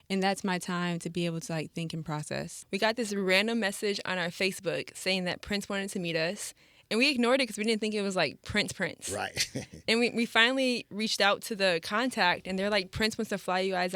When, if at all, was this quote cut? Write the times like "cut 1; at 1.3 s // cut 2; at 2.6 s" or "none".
cut 1; at 2.6 s